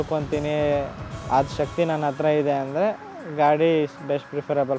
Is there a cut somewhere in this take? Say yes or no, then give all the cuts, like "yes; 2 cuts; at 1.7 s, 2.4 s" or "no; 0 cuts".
no; 0 cuts